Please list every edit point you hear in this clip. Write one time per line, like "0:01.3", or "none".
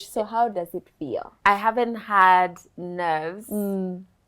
0:01.3